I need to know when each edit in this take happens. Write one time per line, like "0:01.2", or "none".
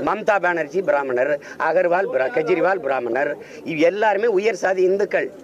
none